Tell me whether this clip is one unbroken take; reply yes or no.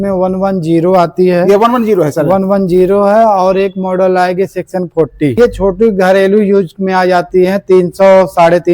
no